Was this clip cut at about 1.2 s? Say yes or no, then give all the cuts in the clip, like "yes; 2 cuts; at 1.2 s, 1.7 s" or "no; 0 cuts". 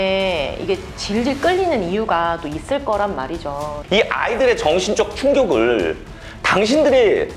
no; 1 cut; at 3.7 s